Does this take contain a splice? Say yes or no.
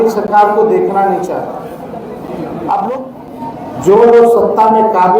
yes